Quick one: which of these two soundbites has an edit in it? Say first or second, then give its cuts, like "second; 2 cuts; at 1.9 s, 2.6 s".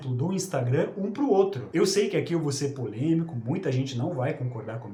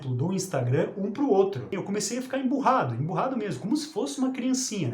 second; 1 cut; at 1.7 s